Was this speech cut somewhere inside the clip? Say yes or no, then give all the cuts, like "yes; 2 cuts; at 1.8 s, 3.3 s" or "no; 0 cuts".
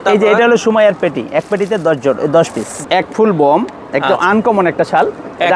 yes; 1 cut; at 2.7 s